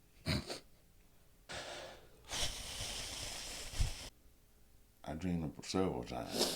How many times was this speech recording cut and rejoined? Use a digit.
2